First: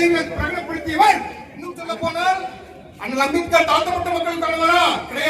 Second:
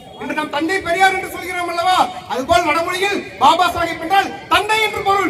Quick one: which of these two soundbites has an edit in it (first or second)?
first